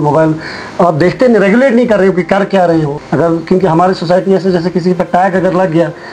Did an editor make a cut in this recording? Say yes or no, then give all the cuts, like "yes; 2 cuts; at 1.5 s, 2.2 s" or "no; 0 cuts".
yes; 1 cut; at 3.0 s